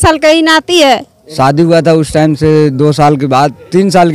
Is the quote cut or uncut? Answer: cut